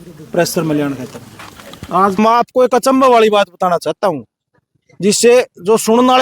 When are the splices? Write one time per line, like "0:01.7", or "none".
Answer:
0:02.2